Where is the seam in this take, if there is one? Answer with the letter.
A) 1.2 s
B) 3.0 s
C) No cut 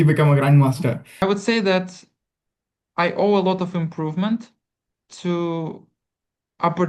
A